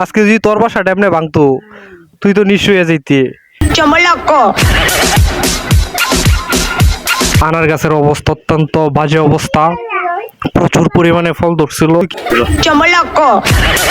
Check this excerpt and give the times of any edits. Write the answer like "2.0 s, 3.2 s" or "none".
3.6 s, 7.4 s, 12.0 s